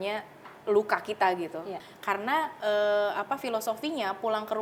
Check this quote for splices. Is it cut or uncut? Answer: cut